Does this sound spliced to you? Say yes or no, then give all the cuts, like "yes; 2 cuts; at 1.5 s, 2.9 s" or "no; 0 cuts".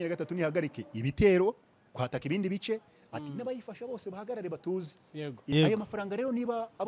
yes; 1 cut; at 5.3 s